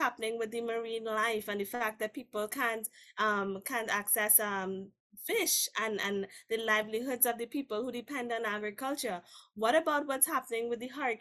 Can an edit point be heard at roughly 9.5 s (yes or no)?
no